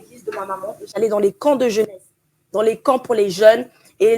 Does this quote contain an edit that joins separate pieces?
no; 0 cuts

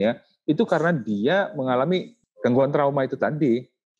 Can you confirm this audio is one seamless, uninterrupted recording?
no; 1 cut; at 2.3 s

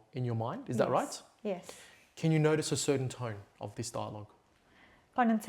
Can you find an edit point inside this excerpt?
no; 0 cuts

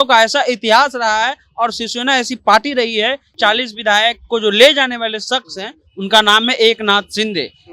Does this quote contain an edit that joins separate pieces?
yes; 1 cut; at 3.3 s

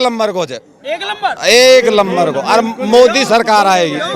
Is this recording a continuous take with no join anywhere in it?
yes; 0 cuts

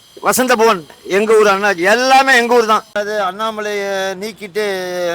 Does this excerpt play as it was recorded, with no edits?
no; 1 cut; at 3.0 s

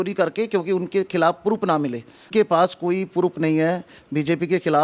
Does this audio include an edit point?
yes; 1 cut; at 2.3 s

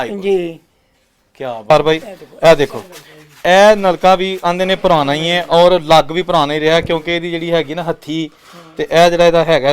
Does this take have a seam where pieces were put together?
yes; 1 cut; at 1.7 s

